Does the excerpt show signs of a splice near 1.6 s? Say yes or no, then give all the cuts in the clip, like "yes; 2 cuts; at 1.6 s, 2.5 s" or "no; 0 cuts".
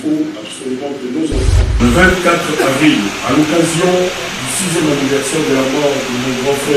yes; 1 cut; at 1.6 s